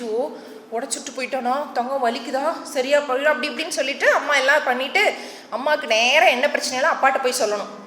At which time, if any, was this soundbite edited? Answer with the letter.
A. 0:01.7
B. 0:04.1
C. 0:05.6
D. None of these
D